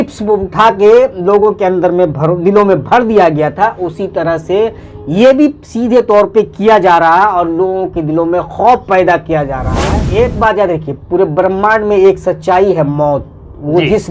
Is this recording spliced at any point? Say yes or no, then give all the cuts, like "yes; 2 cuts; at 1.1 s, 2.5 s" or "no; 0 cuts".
yes; 1 cut; at 10.0 s